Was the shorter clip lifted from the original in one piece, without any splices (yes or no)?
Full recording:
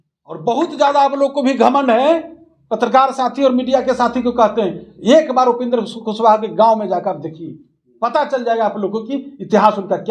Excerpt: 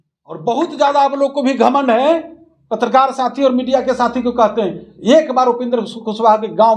yes